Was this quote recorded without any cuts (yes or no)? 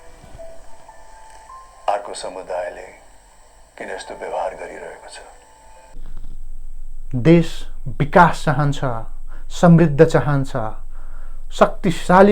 no